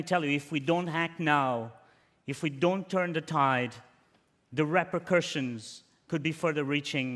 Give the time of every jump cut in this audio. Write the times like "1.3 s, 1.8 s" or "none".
5.9 s